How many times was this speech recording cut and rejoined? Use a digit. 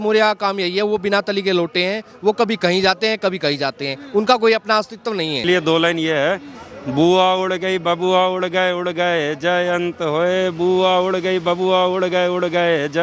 1